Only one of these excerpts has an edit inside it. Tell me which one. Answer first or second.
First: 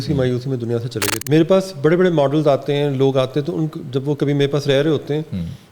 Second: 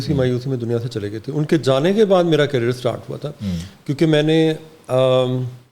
first